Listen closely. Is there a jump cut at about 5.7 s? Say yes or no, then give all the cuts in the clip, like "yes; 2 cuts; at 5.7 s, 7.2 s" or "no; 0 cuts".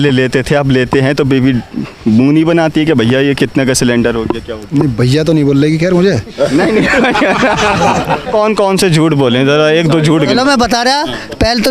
no; 1 cut; at 8.2 s